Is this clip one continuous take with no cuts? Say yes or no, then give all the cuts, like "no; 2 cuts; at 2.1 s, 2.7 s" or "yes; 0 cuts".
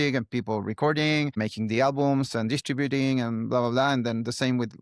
yes; 0 cuts